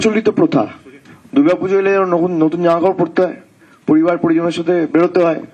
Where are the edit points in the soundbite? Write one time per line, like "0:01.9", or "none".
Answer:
none